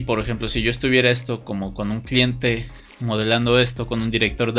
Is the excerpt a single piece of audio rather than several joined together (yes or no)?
yes